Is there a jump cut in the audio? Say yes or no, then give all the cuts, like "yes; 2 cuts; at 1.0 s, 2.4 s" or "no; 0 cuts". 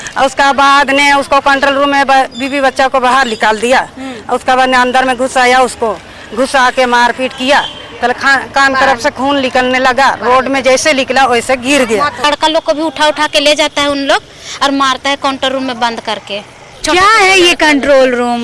yes; 1 cut; at 12.2 s